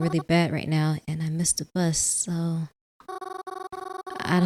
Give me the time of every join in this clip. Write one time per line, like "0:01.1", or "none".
none